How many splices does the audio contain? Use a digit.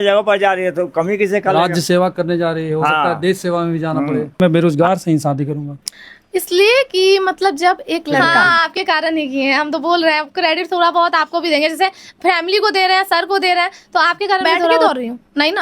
3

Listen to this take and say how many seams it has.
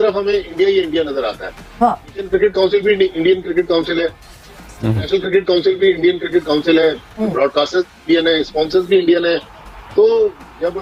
0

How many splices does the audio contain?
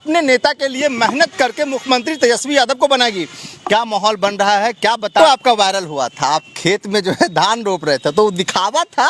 1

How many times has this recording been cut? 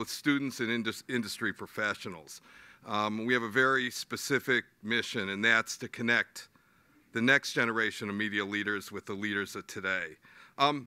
0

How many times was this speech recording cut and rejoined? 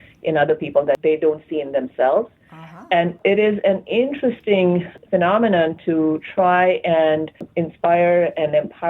4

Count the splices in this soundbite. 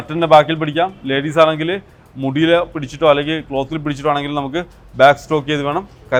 0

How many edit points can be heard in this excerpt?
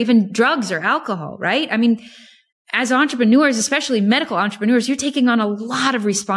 0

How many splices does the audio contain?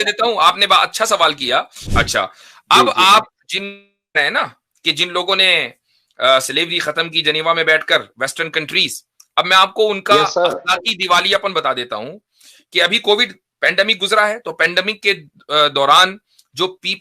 1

